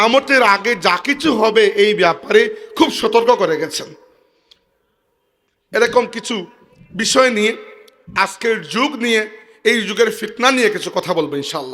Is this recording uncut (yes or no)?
yes